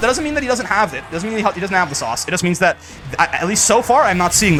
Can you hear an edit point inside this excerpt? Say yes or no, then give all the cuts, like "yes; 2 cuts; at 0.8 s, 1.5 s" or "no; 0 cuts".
no; 0 cuts